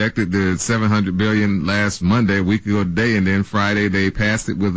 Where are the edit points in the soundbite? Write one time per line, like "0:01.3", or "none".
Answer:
none

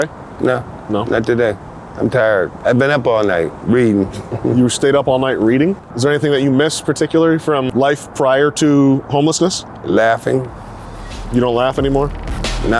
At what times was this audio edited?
0:02.5
0:05.8
0:07.7

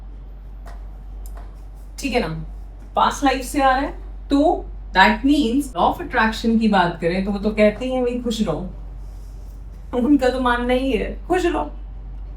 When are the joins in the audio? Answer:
0:05.7

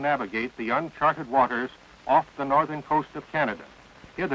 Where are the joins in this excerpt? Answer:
0:02.3

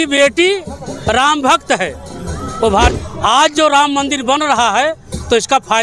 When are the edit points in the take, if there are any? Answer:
0:03.0

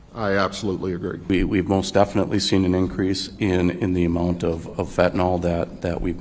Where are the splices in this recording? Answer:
0:01.3

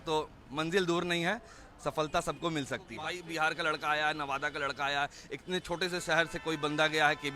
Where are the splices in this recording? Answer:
0:03.1

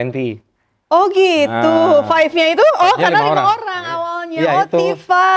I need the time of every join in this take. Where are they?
none

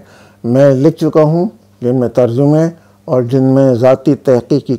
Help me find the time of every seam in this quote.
none

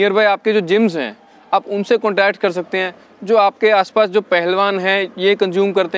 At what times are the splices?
none

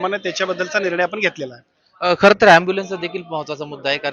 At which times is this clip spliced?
none

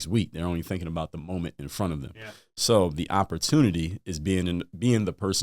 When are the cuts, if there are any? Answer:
none

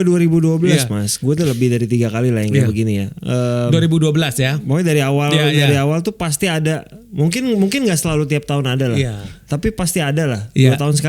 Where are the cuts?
none

